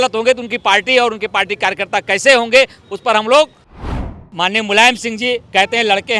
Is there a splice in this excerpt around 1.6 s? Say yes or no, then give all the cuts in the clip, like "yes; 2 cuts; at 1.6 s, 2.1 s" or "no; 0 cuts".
no; 1 cut; at 4.1 s